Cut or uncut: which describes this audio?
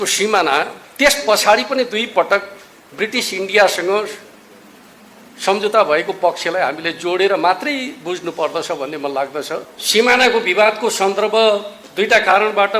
cut